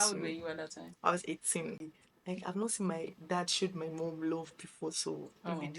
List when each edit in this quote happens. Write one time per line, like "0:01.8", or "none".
0:01.8